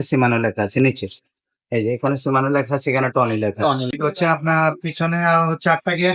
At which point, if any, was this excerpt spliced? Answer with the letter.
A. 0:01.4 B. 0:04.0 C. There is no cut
B